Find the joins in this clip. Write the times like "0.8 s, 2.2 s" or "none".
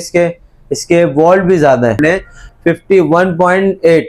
2.0 s